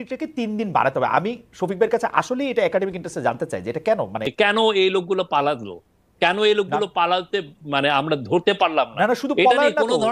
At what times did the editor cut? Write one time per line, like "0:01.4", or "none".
0:04.2